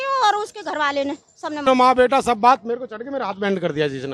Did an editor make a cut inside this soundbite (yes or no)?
yes